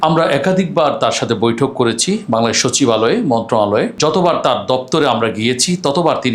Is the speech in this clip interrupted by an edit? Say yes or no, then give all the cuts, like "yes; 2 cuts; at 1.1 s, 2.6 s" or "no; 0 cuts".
yes; 1 cut; at 3.9 s